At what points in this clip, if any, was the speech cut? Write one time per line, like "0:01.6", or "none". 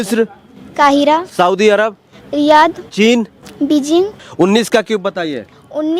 0:04.2